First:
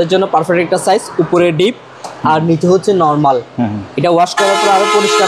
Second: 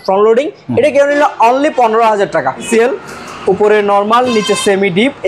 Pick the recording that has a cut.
second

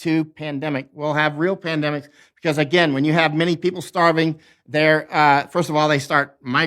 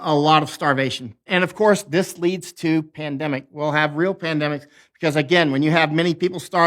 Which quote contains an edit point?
second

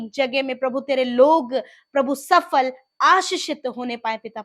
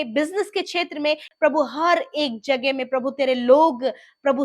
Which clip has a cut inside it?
second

